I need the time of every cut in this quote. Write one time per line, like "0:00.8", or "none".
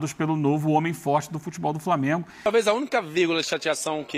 0:02.5